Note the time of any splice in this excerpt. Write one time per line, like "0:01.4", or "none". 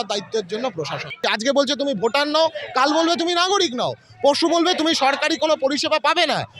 0:01.2